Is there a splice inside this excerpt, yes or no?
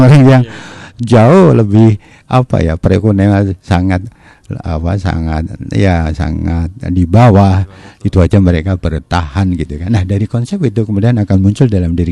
no